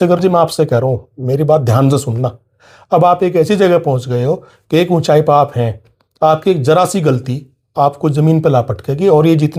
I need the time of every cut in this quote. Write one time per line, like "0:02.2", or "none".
none